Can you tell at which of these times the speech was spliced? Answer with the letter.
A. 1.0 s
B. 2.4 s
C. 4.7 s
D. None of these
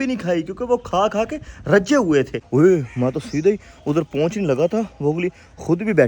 B